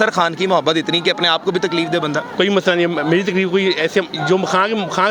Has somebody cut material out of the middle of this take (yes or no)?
no